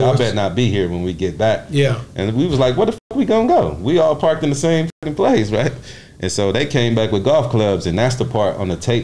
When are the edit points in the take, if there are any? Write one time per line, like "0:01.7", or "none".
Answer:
none